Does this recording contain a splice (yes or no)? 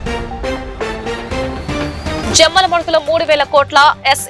yes